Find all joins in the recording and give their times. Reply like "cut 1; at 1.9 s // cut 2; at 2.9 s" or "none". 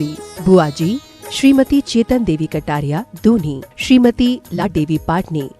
cut 1; at 4.6 s